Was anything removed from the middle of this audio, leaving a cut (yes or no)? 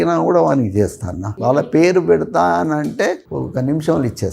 yes